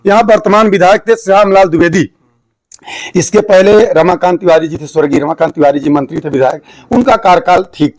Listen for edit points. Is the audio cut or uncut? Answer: uncut